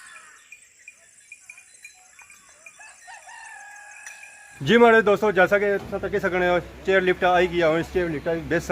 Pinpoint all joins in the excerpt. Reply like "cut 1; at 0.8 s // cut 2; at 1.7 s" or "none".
cut 1; at 4.6 s